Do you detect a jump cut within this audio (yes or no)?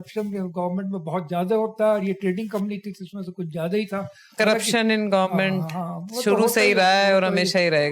no